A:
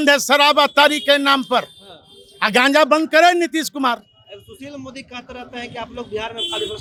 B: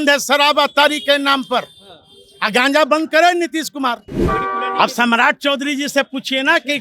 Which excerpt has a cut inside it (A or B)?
B